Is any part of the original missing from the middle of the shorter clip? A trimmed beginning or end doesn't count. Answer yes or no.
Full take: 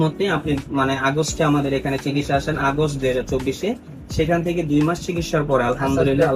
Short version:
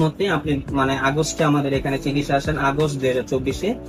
no